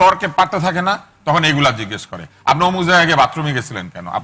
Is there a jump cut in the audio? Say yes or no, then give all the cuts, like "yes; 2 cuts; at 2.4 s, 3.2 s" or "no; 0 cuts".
no; 0 cuts